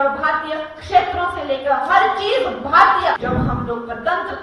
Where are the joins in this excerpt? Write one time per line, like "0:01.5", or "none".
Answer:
0:03.2